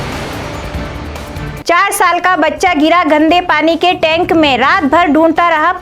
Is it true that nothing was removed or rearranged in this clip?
no; 1 cut; at 1.1 s

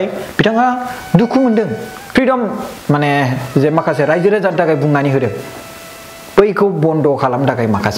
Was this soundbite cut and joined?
yes; 1 cut; at 2.1 s

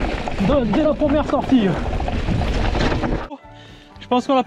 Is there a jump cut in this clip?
yes; 1 cut; at 3.4 s

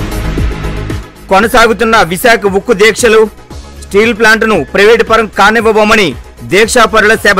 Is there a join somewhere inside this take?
no; 0 cuts

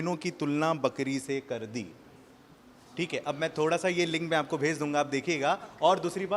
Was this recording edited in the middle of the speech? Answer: no; 0 cuts

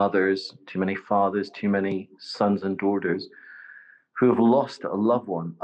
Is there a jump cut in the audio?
no; 0 cuts

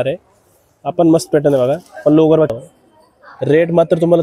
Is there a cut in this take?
yes; 1 cut; at 2.6 s

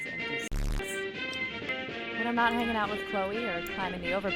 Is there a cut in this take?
yes; 1 cut; at 1.7 s

